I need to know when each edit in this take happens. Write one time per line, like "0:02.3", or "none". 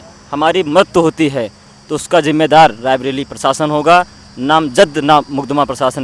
none